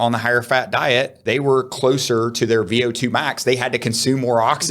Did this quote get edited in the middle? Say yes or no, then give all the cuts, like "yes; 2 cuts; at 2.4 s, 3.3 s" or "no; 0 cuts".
yes; 1 cut; at 1.2 s